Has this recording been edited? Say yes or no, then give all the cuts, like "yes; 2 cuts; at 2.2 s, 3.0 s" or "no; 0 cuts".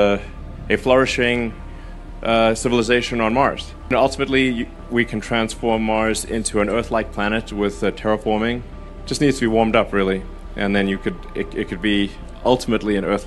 no; 0 cuts